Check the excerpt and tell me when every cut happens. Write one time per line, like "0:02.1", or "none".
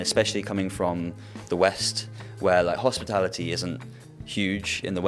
none